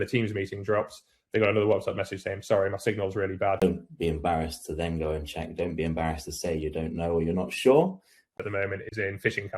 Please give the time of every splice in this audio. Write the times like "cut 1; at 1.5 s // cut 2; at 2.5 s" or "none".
cut 1; at 3.6 s // cut 2; at 8.4 s